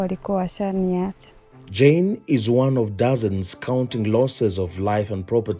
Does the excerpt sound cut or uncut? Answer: uncut